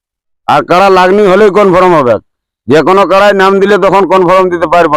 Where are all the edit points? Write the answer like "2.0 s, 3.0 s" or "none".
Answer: none